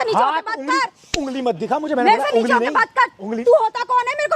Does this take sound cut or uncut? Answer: uncut